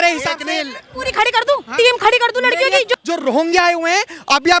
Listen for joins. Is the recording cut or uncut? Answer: cut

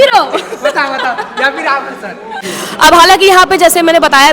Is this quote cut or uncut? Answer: cut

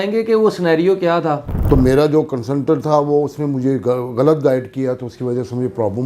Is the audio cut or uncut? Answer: cut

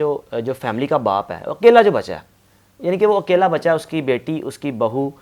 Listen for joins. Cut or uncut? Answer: uncut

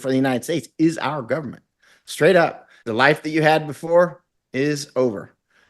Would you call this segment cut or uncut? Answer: cut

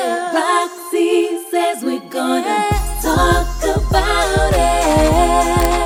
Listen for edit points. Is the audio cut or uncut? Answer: uncut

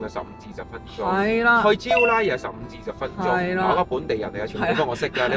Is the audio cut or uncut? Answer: uncut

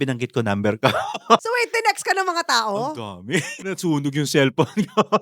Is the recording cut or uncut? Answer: cut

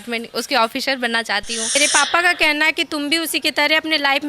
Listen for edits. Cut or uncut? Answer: cut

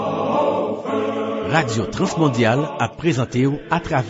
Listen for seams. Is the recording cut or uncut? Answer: uncut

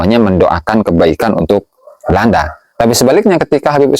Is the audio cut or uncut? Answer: uncut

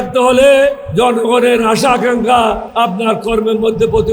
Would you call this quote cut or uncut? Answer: cut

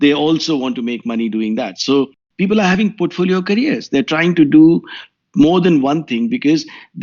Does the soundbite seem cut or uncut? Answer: cut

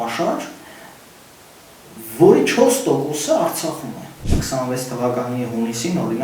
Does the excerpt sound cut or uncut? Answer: cut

